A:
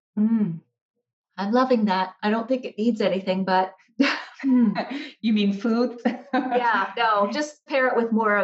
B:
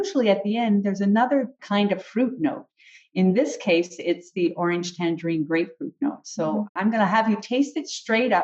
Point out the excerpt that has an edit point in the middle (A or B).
B